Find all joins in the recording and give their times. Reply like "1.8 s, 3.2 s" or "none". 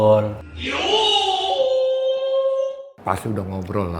2.9 s